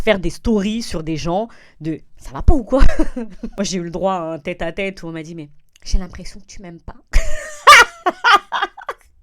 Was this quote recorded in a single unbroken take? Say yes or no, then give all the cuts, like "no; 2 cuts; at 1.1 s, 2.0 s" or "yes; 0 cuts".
no; 1 cut; at 3.4 s